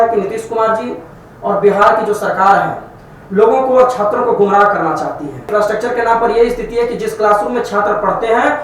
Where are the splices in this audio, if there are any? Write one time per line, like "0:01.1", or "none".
0:05.5

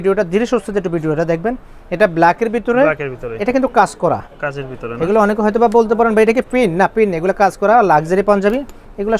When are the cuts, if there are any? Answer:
none

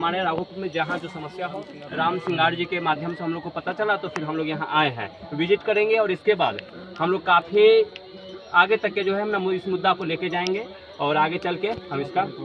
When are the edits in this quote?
0:01.7

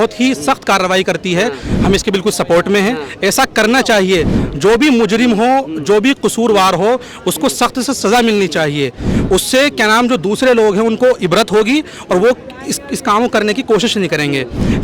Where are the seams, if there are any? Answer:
0:01.2

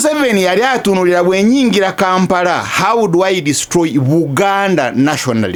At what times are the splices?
none

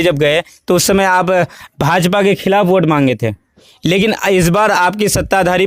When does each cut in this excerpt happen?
none

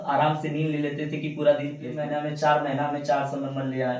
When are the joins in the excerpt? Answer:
0:02.0

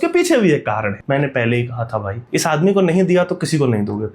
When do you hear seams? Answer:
0:00.9
0:02.2

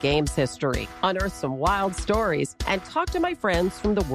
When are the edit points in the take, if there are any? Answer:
none

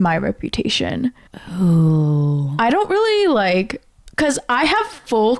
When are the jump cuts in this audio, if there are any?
none

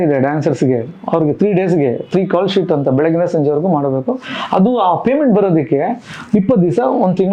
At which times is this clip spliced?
none

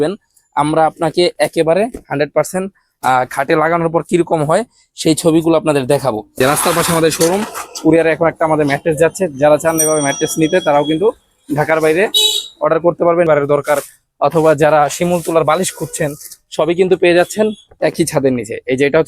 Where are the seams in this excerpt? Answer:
0:06.4
0:13.3

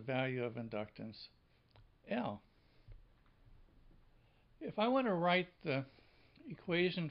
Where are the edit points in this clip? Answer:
0:02.9

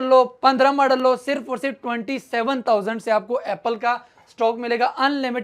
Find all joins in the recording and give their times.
none

